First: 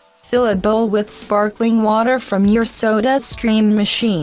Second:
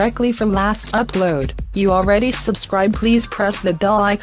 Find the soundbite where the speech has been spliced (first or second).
first